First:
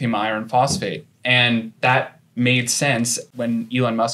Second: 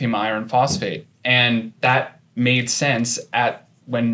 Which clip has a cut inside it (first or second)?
first